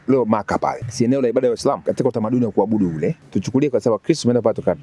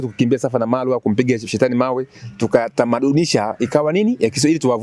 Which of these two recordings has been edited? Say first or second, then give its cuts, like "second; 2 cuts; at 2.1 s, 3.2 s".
first; 3 cuts; at 0.8 s, 1.8 s, 3.2 s